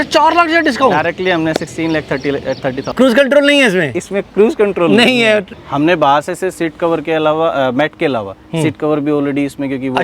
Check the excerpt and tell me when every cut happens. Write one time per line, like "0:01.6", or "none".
0:02.9
0:05.6